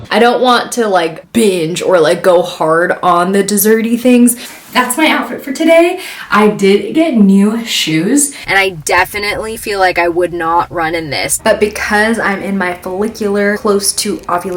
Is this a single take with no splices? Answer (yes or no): no